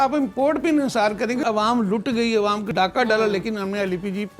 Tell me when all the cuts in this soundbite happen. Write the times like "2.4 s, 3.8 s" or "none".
1.4 s, 2.7 s